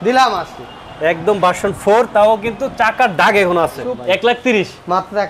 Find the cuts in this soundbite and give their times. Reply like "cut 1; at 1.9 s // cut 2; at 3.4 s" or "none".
cut 1; at 3.9 s